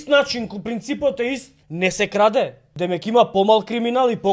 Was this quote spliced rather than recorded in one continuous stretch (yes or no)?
yes